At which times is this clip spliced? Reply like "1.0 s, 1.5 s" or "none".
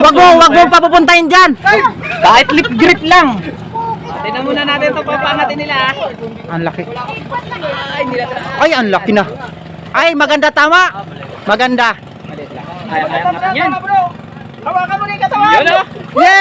1.7 s, 4.1 s